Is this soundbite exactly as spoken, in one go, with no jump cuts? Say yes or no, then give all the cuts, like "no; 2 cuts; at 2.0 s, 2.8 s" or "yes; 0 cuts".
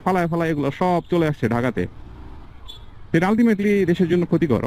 yes; 0 cuts